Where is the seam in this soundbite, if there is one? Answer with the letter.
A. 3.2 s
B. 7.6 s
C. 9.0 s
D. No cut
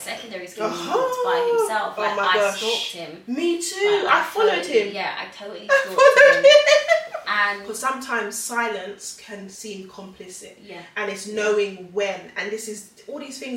B